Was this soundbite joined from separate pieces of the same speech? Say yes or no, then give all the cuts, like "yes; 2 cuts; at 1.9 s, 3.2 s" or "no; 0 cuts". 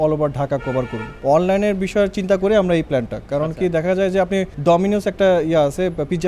yes; 2 cuts; at 1.0 s, 4.5 s